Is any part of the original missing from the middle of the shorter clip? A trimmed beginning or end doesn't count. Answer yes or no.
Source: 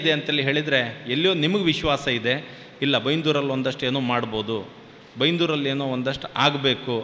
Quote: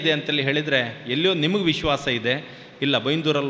no